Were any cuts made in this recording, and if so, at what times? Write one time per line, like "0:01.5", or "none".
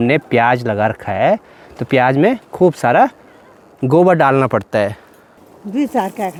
none